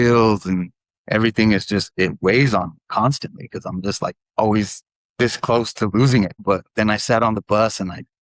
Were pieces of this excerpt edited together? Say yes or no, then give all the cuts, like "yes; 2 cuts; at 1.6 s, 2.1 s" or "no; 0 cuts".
yes; 1 cut; at 6.4 s